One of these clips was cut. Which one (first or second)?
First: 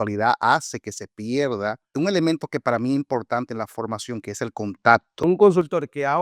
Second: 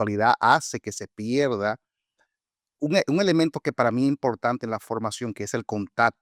first